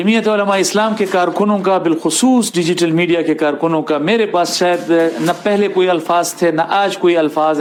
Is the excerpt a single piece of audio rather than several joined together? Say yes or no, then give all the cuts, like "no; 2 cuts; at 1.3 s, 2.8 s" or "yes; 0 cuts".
yes; 0 cuts